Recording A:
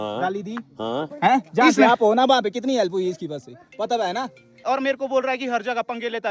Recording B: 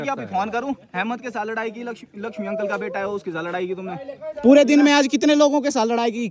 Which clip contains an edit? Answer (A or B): A